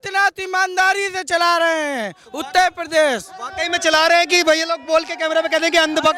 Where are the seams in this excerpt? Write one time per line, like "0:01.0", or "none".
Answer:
none